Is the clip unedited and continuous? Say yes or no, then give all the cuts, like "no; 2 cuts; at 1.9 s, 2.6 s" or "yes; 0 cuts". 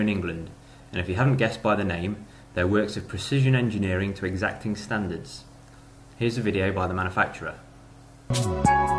no; 1 cut; at 6.5 s